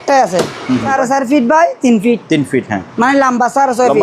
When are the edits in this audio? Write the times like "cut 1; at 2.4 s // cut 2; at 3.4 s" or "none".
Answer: cut 1; at 0.9 s // cut 2; at 2.8 s